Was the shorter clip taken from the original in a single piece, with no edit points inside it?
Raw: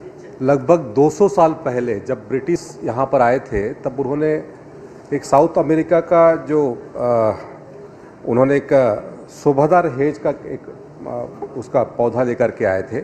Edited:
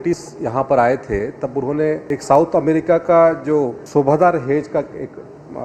no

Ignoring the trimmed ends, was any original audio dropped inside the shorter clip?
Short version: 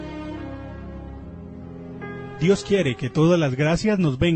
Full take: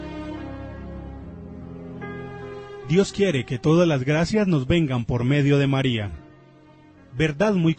yes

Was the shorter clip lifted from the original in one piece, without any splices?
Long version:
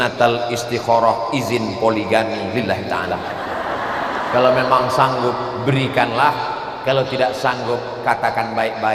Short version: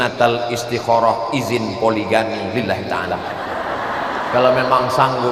yes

